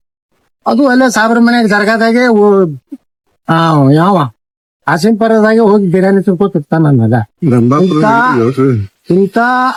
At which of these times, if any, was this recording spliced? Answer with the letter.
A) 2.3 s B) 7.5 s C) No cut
C